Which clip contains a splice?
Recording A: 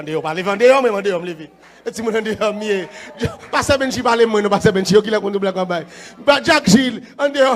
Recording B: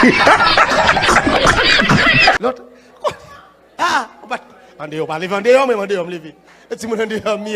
B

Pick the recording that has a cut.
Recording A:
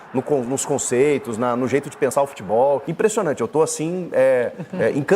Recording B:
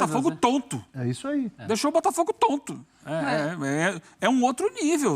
A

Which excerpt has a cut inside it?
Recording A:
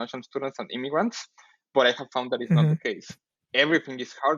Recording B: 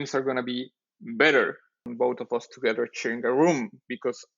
B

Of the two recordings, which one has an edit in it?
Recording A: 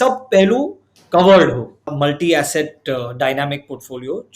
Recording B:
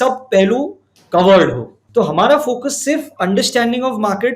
A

